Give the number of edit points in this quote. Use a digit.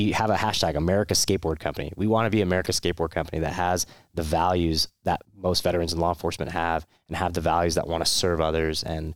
1